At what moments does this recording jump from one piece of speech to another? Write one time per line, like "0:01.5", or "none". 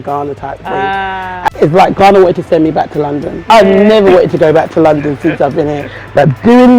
0:01.5
0:03.4

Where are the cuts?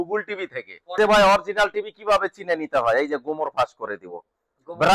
0:00.9

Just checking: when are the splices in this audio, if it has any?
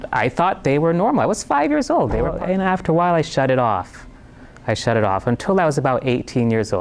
0:02.3

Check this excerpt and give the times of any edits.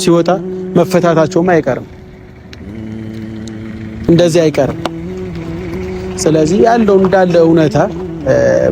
0:04.9
0:06.2

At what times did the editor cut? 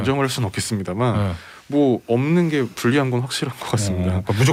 none

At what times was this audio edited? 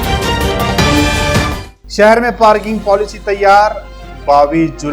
0:01.5

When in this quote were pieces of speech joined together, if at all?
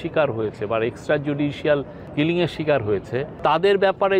0:02.0
0:03.3

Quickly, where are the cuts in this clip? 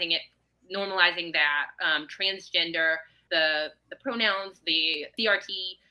0:03.1
0:05.1

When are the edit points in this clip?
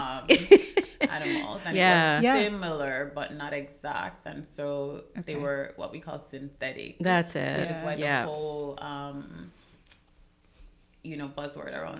none

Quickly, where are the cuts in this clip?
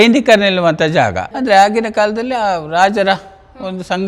0:01.3

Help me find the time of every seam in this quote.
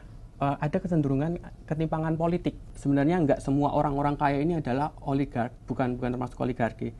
0:02.7

